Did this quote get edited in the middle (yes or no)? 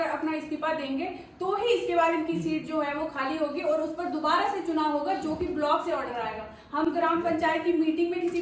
no